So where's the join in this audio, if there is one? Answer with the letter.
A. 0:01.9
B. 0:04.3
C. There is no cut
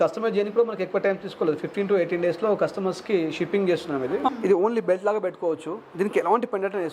B